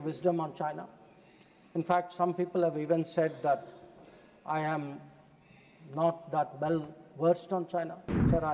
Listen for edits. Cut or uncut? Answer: uncut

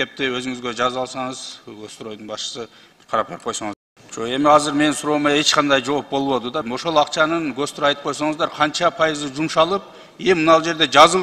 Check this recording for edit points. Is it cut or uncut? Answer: cut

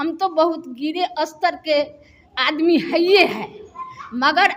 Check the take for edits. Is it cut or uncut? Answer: uncut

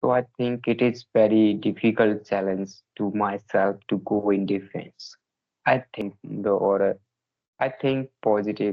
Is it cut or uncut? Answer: cut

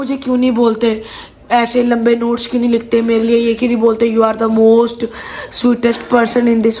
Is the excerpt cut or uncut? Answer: uncut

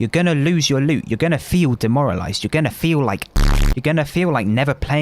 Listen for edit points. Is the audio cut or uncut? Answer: cut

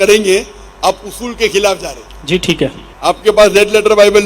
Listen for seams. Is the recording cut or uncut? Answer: cut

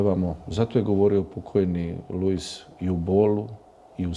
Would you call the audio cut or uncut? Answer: uncut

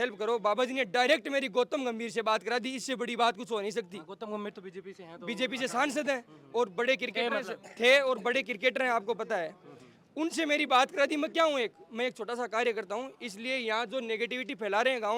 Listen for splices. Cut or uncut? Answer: uncut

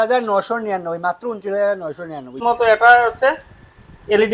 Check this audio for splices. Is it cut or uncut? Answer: cut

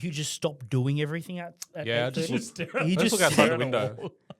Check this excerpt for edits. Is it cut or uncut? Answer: uncut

